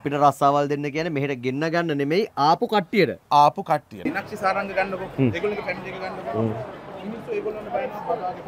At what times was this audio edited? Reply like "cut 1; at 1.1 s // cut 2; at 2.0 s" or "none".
cut 1; at 4.0 s